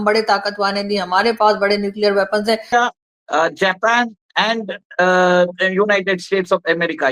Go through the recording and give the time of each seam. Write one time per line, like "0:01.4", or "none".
0:02.7